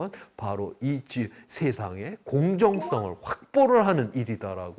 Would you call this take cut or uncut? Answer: uncut